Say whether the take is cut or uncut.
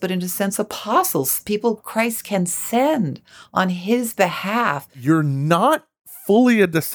cut